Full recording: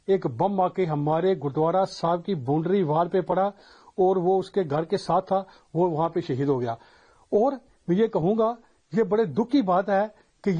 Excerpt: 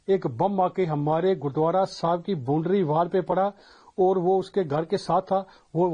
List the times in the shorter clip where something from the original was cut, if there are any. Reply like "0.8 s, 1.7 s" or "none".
none